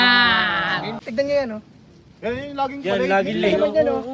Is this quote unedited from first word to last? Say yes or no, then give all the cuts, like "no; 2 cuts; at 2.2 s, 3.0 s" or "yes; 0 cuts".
no; 1 cut; at 1.0 s